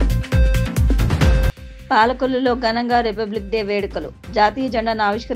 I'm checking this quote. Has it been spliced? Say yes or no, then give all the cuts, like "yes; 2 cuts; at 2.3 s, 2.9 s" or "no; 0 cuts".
yes; 1 cut; at 1.0 s